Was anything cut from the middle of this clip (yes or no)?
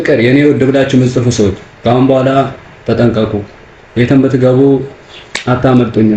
no